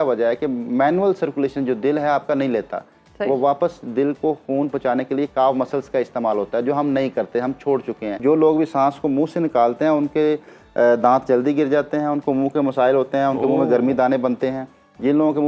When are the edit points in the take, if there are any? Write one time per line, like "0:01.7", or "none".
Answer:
0:08.2

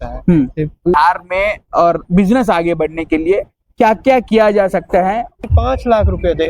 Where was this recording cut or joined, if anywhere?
0:00.9
0:05.4

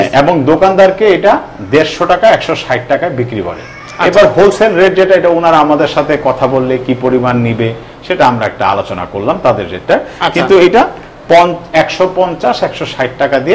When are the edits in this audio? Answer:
none

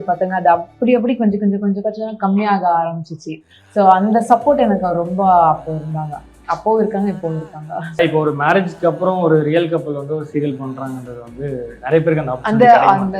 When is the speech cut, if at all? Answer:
0:08.0

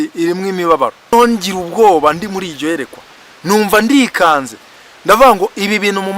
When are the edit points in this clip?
0:01.1

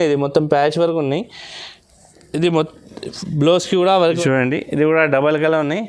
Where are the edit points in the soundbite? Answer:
0:04.1

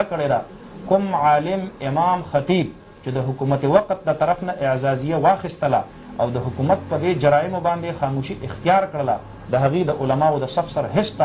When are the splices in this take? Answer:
none

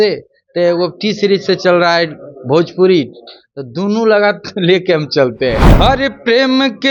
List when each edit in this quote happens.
0:05.7

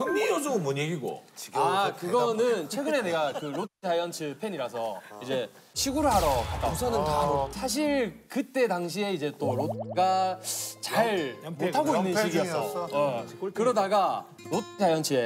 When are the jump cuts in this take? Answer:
0:07.5

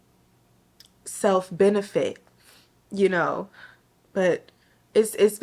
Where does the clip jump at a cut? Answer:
none

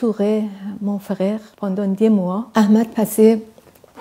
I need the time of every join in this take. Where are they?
0:01.5
0:02.5

